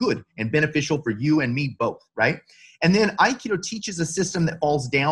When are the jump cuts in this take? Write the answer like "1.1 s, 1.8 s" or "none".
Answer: none